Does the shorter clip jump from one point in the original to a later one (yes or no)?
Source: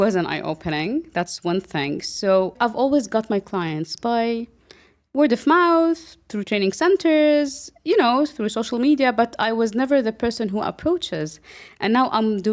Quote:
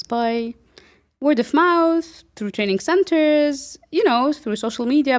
no